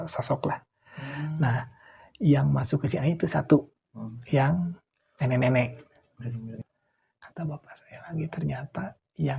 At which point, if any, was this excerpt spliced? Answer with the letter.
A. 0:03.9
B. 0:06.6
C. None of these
B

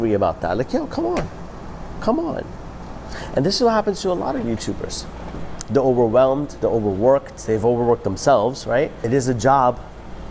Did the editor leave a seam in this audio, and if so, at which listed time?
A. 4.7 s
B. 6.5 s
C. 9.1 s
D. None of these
C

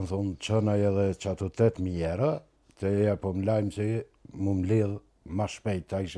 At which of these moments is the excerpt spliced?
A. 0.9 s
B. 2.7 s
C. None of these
C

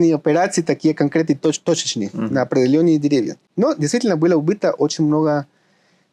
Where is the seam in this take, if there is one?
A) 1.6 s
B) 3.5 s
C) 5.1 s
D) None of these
D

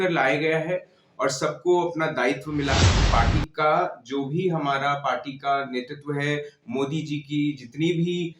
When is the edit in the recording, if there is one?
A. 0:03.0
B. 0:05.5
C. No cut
A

